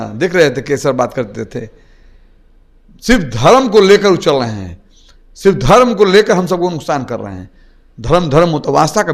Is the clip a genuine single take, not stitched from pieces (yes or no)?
yes